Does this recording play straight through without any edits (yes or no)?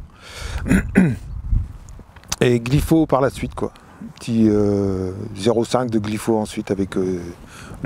yes